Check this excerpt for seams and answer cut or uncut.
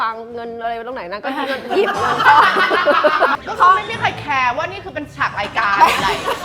cut